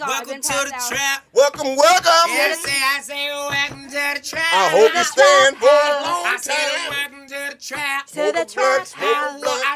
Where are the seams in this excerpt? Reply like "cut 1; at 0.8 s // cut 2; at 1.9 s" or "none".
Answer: none